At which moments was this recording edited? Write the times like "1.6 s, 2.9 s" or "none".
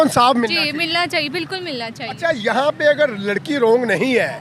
none